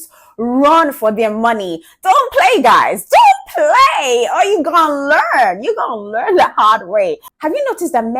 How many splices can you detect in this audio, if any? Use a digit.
1